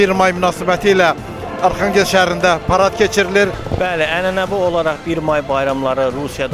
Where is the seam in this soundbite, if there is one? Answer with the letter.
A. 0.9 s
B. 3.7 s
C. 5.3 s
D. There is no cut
B